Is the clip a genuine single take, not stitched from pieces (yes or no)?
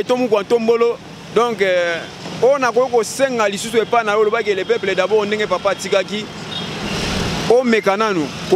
yes